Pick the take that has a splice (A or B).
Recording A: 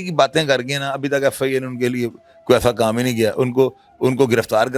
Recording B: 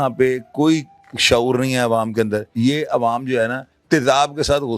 B